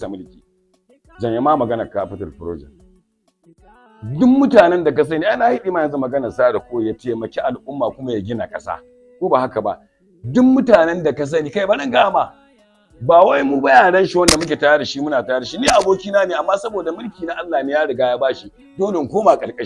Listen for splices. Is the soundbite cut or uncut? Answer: uncut